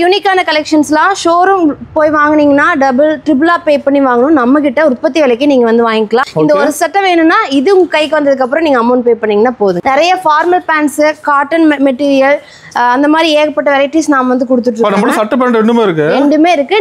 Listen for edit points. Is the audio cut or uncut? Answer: cut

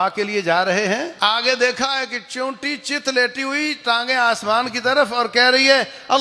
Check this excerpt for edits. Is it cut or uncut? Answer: cut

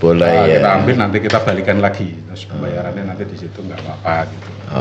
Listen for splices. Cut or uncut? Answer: uncut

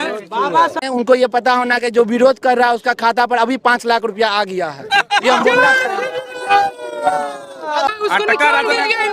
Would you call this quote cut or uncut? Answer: cut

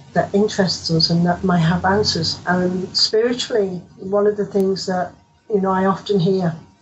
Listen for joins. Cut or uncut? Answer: cut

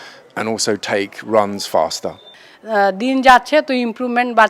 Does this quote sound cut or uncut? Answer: cut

